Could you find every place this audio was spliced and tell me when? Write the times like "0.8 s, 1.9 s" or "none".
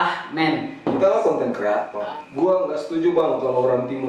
1.9 s